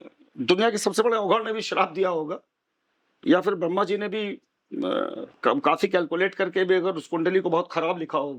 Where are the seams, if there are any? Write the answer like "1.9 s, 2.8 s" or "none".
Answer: none